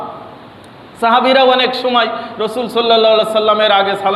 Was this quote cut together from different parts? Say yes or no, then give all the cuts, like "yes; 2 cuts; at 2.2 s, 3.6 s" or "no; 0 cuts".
no; 0 cuts